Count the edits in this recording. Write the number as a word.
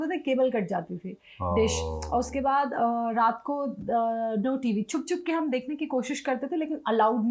zero